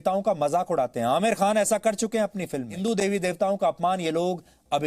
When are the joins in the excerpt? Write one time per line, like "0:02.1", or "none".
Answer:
0:02.7